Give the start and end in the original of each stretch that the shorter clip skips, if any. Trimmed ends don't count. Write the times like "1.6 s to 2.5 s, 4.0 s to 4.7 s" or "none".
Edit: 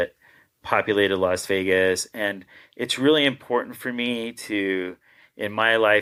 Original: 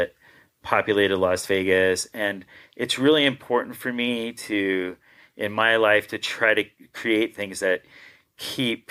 none